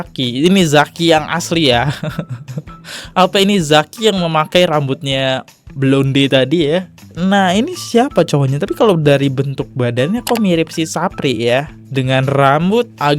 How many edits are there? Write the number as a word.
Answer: one